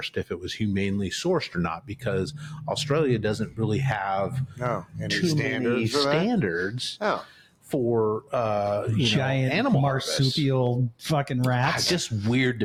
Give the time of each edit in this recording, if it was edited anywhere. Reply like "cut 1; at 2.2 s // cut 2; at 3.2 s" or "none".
none